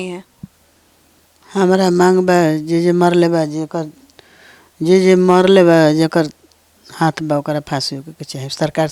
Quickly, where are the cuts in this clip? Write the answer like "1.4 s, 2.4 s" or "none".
none